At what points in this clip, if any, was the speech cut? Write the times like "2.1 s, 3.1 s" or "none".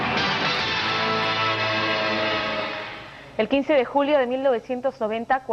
1.3 s